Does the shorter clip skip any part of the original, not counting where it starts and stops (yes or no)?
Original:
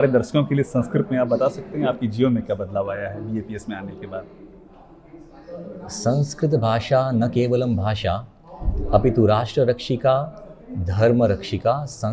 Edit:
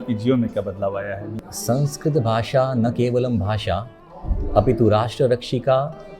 yes